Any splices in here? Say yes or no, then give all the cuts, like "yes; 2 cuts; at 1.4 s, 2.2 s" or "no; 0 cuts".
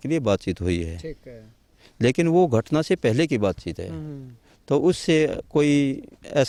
no; 0 cuts